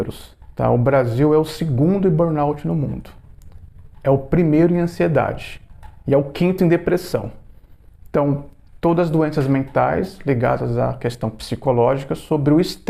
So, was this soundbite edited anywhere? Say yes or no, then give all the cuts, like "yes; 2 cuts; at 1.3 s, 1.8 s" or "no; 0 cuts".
no; 0 cuts